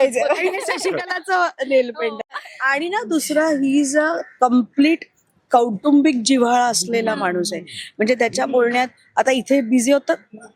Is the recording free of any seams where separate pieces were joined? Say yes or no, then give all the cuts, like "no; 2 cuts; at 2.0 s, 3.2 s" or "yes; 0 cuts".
no; 1 cut; at 2.2 s